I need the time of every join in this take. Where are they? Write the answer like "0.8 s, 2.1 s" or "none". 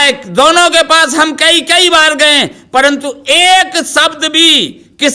none